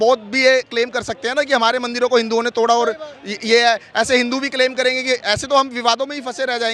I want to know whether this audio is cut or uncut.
uncut